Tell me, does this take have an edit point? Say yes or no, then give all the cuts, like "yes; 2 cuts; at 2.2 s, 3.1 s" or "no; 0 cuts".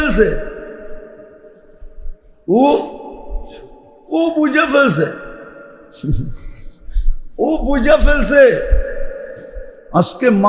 no; 0 cuts